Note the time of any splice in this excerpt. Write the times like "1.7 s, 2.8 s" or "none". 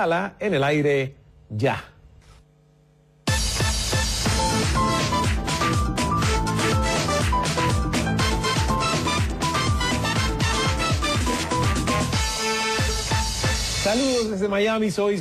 none

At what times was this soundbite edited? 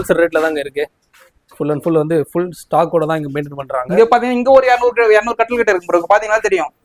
none

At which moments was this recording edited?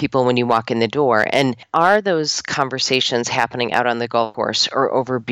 1.7 s, 4.3 s

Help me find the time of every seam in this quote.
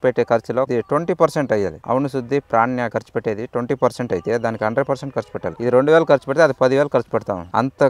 none

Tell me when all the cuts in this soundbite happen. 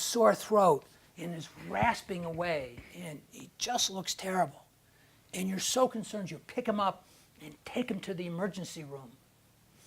7.5 s

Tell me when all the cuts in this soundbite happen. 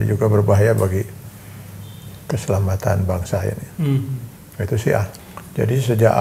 5.2 s

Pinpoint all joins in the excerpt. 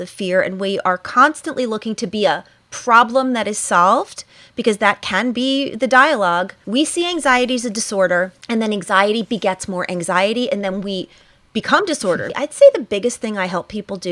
6.6 s, 8.4 s, 12.3 s

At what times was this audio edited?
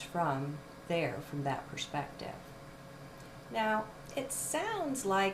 2.2 s

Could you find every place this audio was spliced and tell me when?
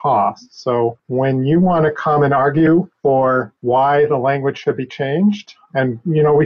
1.0 s, 3.3 s

